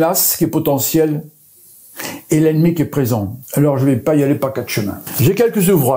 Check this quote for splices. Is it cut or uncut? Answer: cut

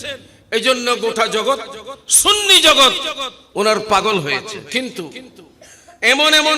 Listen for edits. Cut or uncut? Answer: cut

